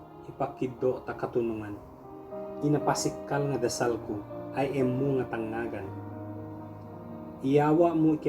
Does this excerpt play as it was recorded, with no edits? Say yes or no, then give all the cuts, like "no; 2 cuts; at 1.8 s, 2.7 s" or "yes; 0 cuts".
no; 2 cuts; at 5.9 s, 7.4 s